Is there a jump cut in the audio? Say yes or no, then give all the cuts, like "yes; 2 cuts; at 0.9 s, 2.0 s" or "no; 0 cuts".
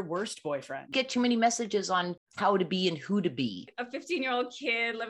yes; 3 cuts; at 0.9 s, 2.2 s, 3.7 s